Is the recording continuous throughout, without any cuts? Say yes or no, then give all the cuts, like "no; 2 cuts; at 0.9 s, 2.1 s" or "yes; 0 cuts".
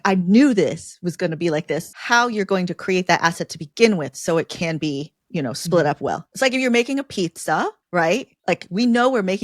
no; 1 cut; at 1.9 s